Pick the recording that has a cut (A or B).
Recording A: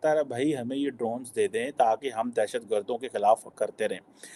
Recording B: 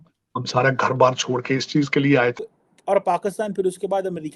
B